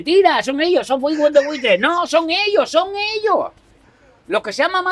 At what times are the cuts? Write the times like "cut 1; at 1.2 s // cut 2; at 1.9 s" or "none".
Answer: none